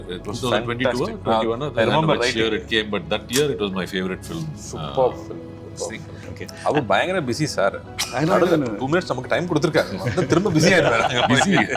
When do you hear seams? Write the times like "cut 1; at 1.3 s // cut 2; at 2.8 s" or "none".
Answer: cut 1; at 6.2 s